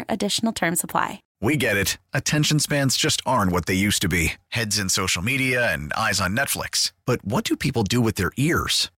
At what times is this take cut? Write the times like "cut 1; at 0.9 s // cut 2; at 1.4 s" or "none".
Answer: cut 1; at 1.3 s